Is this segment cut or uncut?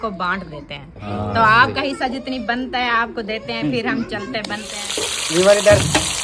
cut